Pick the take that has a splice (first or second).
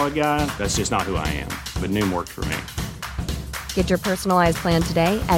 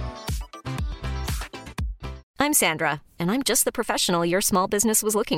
second